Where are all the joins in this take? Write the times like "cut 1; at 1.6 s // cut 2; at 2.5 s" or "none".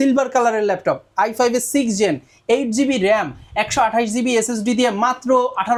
none